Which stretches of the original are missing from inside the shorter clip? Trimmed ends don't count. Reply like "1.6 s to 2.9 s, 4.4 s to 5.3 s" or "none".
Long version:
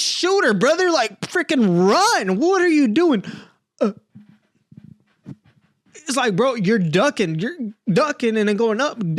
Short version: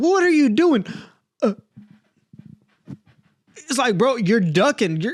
none